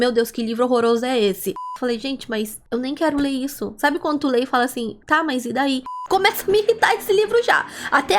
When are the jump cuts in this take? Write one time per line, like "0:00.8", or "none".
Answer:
0:01.5
0:05.9